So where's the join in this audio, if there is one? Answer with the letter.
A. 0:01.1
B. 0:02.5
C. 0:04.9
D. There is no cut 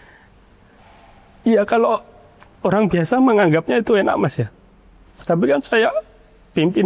D